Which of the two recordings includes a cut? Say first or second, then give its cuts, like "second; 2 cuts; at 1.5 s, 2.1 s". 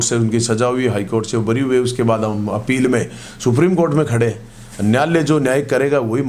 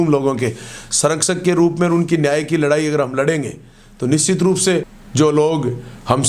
second; 1 cut; at 5.0 s